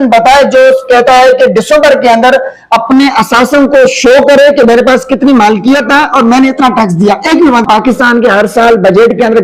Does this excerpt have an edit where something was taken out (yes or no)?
yes